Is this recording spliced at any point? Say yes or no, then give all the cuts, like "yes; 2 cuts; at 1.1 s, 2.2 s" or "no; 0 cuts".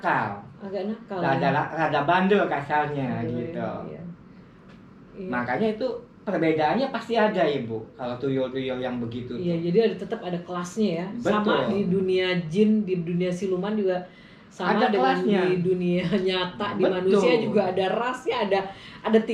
no; 0 cuts